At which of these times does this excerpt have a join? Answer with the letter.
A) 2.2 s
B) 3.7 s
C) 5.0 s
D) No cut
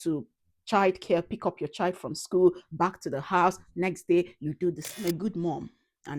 C